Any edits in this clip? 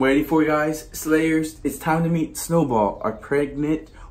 no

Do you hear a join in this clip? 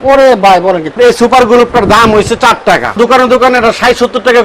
yes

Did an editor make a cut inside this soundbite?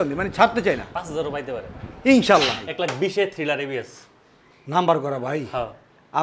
yes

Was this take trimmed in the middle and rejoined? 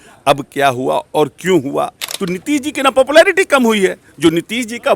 yes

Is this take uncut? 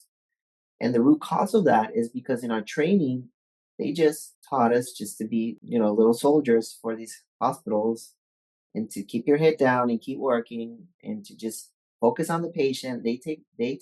no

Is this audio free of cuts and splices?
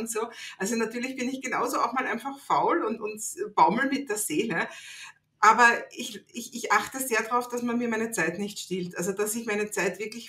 yes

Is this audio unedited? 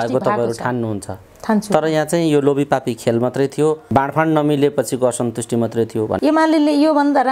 no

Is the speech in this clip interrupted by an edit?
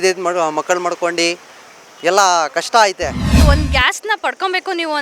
yes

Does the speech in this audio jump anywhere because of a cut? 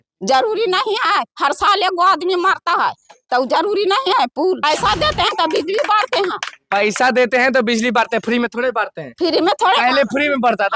yes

